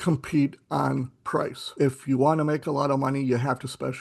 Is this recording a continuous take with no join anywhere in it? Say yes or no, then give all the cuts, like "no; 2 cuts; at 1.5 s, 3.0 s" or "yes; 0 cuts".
no; 1 cut; at 1.7 s